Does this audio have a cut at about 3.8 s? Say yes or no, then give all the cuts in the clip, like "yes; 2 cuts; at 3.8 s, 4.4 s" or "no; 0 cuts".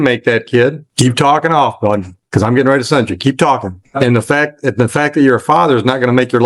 yes; 2 cuts; at 0.9 s, 3.8 s